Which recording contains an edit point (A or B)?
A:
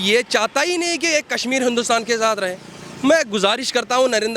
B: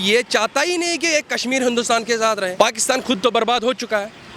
B